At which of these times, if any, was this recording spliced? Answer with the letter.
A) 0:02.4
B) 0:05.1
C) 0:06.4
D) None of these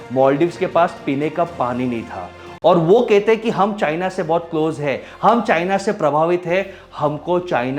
A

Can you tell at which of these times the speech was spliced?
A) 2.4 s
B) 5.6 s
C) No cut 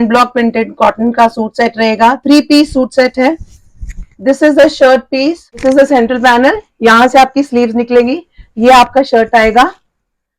B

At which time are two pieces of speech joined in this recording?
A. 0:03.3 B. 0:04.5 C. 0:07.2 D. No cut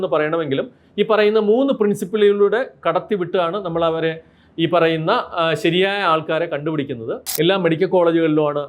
C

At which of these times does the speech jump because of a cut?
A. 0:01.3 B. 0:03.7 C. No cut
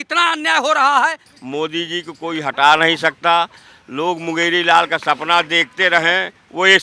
A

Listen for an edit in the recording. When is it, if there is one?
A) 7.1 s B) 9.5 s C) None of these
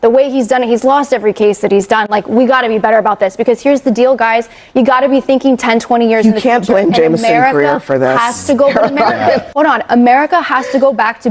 B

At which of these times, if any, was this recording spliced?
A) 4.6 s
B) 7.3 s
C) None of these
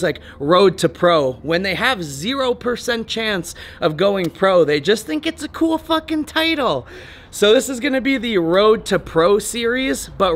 C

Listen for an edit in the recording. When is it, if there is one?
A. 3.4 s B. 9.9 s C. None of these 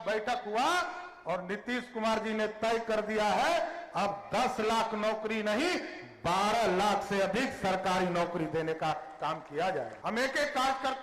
B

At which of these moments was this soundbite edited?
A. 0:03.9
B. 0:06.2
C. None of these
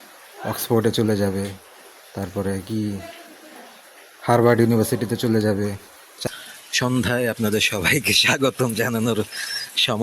B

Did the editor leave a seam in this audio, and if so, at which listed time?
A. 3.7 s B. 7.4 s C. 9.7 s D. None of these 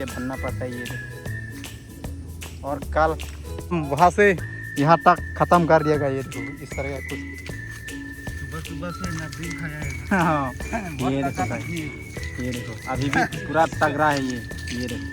A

